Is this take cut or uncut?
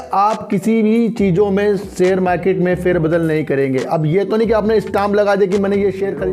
uncut